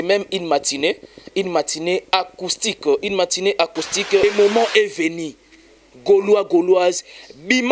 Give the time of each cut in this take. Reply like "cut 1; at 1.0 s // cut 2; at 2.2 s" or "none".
cut 1; at 4.2 s